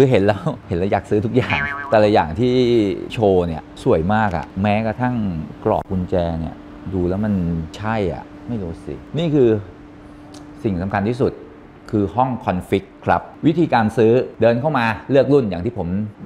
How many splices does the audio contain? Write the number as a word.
zero